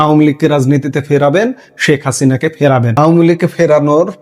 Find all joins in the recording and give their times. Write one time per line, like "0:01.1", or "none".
0:02.9